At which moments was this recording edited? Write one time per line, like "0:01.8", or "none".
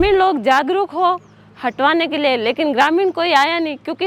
none